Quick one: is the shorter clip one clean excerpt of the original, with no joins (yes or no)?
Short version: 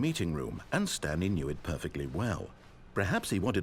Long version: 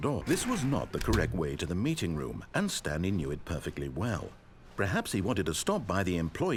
yes